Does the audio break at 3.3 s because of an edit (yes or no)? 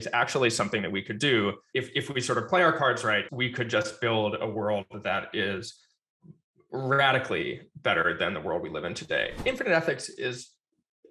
yes